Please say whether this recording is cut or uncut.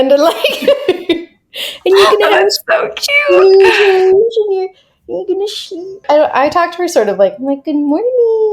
cut